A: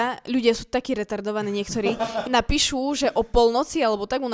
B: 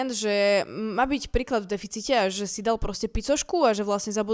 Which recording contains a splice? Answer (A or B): A